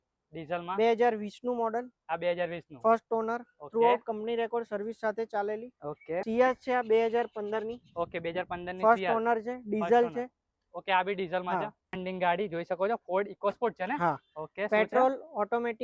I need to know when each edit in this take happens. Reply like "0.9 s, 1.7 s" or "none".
6.2 s, 11.8 s